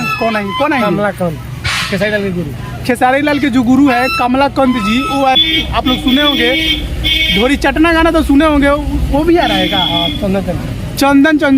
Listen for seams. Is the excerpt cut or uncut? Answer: cut